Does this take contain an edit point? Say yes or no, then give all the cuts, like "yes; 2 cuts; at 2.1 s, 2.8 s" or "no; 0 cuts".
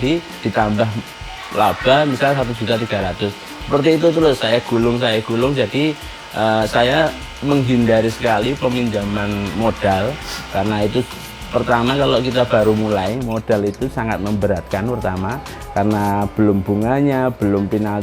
no; 0 cuts